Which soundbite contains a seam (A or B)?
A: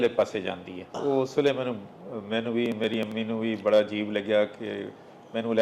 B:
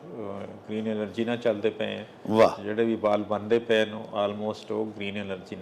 A